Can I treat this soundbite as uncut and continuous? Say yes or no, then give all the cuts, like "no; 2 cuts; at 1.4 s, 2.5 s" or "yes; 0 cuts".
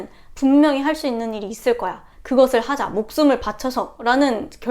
no; 1 cut; at 2.1 s